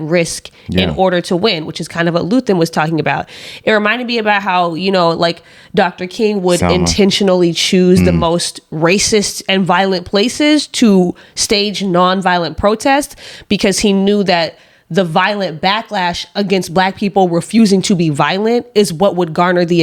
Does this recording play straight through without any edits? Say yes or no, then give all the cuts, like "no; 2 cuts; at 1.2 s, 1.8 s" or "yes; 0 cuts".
yes; 0 cuts